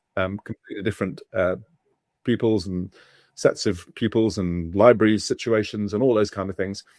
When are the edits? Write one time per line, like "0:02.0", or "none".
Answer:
none